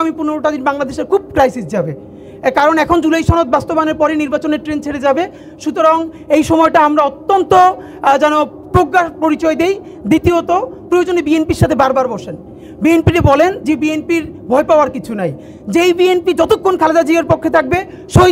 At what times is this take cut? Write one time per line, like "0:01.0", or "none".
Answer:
none